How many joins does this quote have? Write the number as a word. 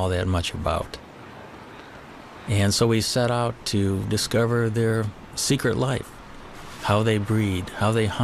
one